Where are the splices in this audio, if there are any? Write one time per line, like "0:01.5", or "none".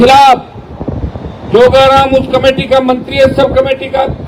none